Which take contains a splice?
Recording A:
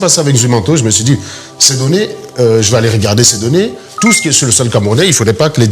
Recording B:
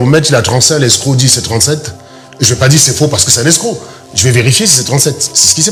A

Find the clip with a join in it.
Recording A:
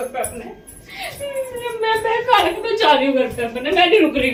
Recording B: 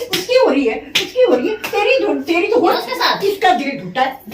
B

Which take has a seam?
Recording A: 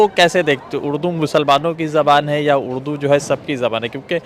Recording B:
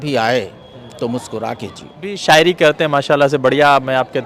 B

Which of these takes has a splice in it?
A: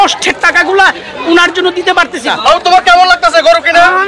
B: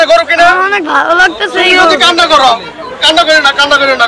A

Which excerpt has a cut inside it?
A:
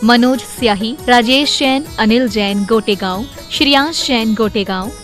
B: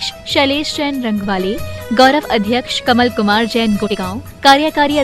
B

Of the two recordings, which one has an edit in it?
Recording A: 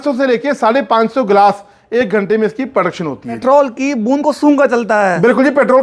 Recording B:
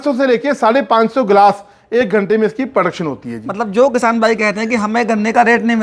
A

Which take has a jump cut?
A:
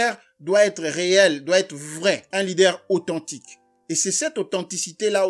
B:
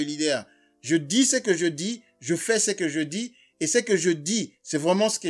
A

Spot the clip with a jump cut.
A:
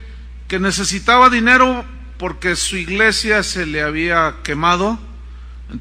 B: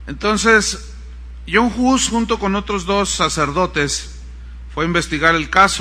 A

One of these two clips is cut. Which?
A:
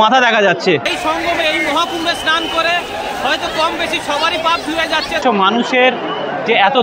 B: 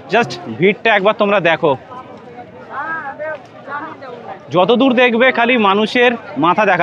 A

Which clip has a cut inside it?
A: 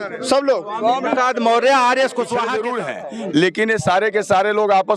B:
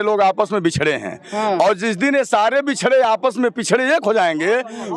A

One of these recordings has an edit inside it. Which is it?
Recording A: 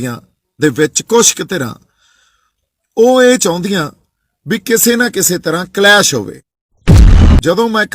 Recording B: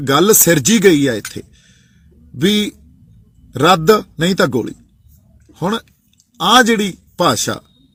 A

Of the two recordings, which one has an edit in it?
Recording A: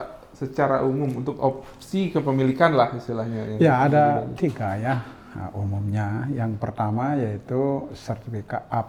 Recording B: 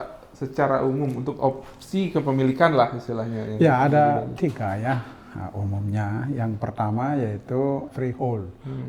B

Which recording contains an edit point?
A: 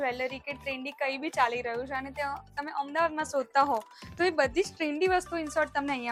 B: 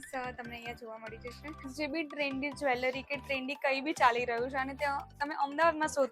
B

